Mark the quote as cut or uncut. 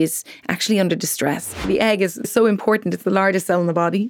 cut